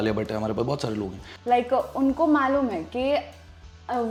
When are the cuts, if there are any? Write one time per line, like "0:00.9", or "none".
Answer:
none